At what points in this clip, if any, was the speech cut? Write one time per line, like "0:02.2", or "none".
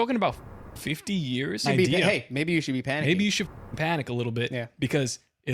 0:01.6

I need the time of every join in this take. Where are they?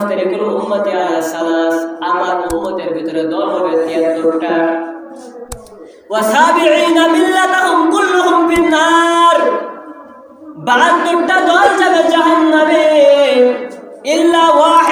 none

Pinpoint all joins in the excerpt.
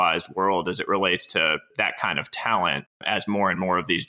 0:01.7
0:03.0

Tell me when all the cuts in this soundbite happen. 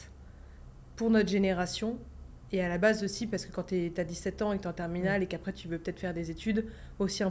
none

